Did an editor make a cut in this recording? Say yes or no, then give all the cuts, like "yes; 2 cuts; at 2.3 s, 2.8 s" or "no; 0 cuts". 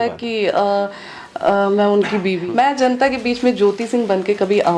yes; 1 cut; at 2.4 s